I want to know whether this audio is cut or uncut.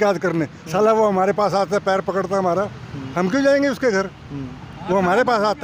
uncut